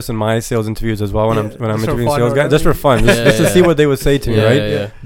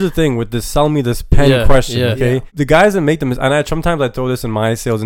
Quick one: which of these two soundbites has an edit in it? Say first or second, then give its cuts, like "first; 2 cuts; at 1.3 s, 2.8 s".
second; 1 cut; at 2.5 s